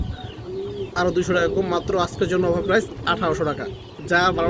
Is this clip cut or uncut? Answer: uncut